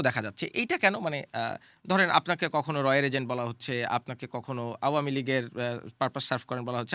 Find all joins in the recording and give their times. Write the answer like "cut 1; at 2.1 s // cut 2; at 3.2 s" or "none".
none